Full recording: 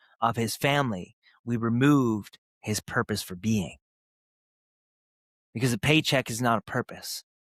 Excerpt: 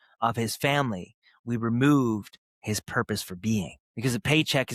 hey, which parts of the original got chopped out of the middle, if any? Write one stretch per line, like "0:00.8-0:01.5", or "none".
0:03.8-0:05.4